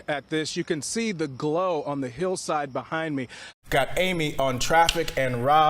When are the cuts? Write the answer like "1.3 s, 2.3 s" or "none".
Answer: 3.5 s